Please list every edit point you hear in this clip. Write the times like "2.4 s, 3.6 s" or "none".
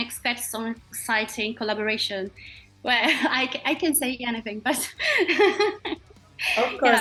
none